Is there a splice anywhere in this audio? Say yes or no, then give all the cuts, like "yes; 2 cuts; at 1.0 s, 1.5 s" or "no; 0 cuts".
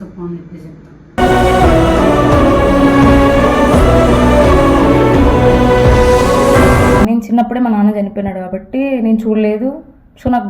yes; 1 cut; at 7.1 s